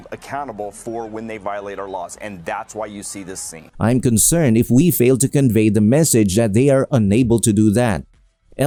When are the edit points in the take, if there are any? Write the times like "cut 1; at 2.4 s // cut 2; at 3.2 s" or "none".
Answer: none